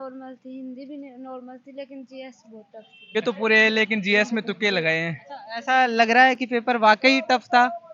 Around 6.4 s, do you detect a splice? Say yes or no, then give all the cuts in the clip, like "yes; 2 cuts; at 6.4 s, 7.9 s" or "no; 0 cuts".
no; 1 cut; at 3.2 s